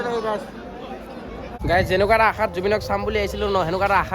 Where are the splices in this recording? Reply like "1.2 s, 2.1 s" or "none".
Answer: 1.5 s